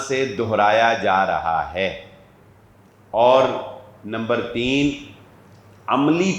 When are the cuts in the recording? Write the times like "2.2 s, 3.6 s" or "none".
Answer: none